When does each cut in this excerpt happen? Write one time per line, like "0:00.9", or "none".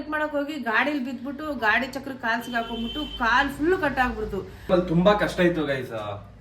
0:04.4